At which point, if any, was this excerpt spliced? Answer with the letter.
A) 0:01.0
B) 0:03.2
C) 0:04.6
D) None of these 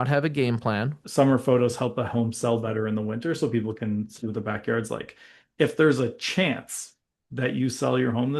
A